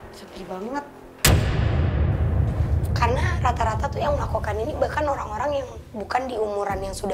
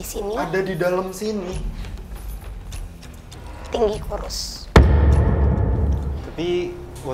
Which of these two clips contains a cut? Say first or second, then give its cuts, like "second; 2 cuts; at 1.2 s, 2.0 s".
second; 1 cut; at 6.0 s